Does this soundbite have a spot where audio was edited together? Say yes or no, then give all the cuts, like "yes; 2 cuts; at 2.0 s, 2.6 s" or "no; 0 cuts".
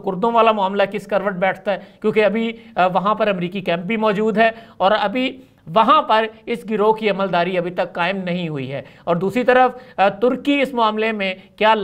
no; 0 cuts